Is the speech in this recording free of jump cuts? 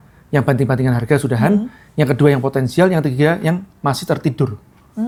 yes; 0 cuts

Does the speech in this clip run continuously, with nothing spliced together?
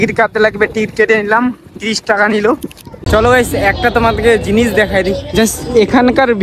no; 1 cut; at 3.0 s

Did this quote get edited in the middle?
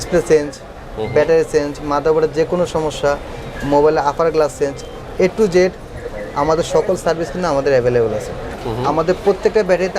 yes; 1 cut; at 8.5 s

